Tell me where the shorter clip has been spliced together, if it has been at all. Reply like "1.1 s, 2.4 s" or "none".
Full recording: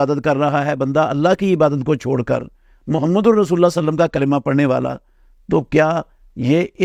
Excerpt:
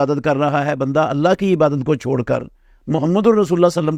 none